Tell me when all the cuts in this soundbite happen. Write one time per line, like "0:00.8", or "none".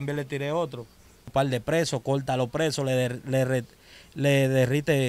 0:01.3